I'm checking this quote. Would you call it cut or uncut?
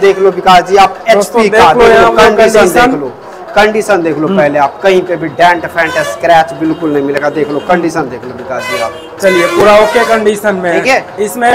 uncut